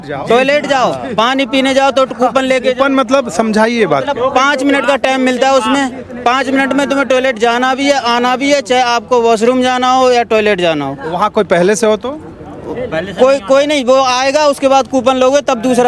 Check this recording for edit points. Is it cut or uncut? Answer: uncut